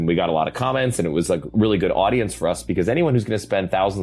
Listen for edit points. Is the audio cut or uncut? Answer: uncut